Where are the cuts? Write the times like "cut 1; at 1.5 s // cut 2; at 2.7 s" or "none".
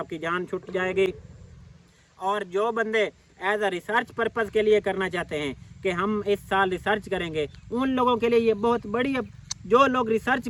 none